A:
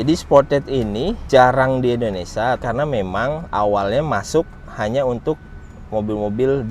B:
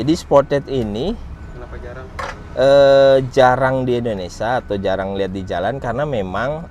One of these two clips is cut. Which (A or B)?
A